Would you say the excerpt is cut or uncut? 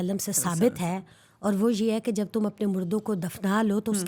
uncut